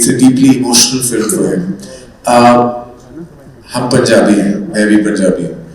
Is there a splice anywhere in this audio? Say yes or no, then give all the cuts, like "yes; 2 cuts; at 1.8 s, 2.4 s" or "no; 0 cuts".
no; 0 cuts